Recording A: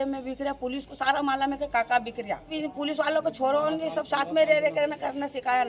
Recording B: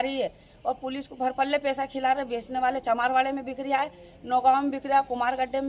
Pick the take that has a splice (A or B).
A